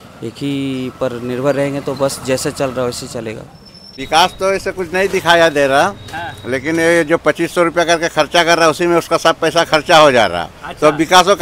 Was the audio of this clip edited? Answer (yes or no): yes